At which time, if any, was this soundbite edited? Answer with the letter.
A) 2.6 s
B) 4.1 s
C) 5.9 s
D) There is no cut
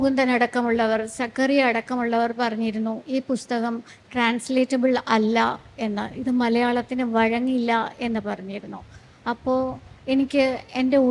D